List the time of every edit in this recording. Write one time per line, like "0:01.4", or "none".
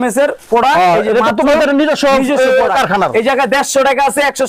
none